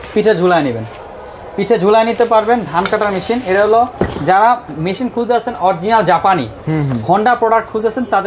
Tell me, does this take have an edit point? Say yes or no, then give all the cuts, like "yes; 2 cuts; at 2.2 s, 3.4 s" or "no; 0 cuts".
no; 0 cuts